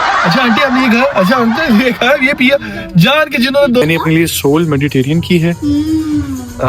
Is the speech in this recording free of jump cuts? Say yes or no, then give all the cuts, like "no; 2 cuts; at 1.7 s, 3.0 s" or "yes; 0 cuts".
no; 1 cut; at 3.8 s